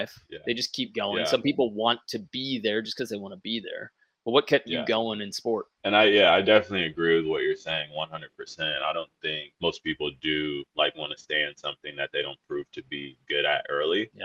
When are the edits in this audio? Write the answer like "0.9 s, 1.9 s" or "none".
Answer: none